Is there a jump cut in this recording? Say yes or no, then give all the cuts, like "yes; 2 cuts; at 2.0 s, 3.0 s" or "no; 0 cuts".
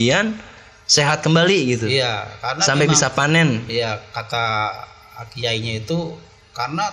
no; 0 cuts